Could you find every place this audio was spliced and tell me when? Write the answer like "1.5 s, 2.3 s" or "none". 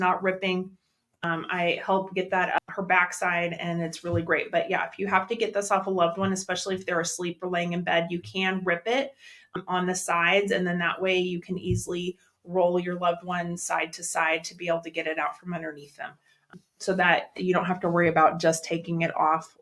1.2 s, 2.6 s, 9.6 s, 16.5 s

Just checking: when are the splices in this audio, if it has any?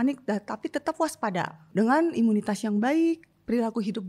1.7 s

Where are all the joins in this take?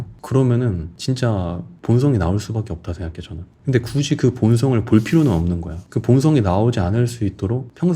5.7 s

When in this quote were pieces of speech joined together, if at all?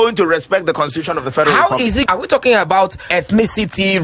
2.1 s, 3.1 s

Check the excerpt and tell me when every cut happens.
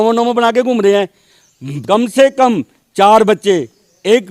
1.7 s

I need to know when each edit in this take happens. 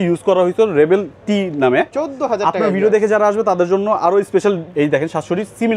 1.9 s, 4.6 s

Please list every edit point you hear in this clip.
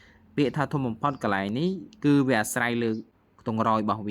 3.1 s

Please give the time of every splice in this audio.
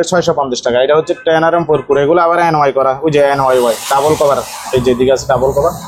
none

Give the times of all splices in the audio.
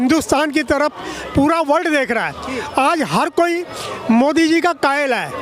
none

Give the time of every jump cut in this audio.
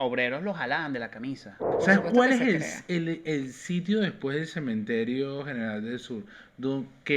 1.6 s

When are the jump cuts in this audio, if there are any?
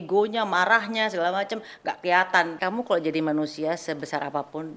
2.5 s

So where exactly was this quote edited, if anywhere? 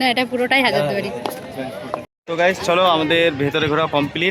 2.1 s

